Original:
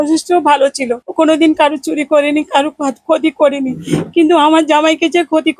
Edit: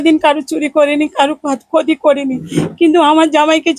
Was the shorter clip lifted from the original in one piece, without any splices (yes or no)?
yes